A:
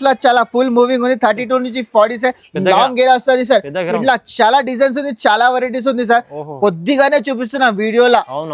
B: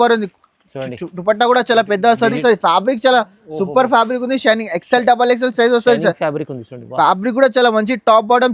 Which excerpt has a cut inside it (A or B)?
B